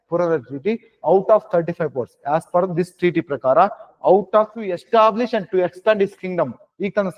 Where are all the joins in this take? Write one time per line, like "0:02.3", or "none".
0:04.8